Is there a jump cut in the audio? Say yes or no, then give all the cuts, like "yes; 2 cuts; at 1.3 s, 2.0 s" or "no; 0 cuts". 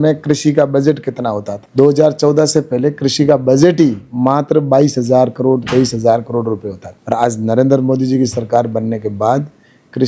no; 0 cuts